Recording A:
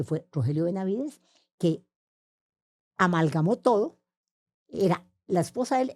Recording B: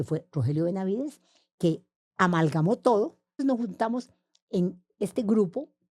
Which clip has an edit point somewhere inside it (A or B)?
B